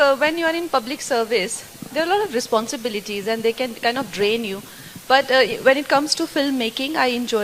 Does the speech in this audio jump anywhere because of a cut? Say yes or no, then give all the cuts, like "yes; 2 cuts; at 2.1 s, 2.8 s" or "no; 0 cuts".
no; 0 cuts